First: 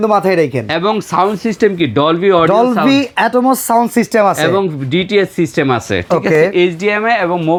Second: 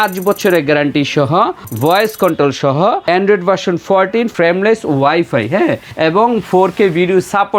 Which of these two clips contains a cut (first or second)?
second